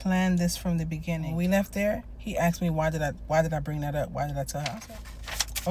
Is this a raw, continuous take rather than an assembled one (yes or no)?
no